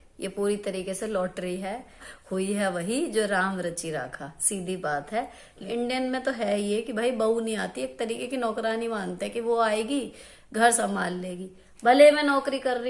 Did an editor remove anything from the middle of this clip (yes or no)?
yes